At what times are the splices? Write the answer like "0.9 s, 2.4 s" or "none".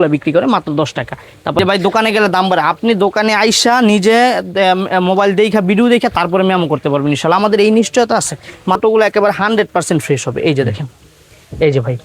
1.6 s, 8.8 s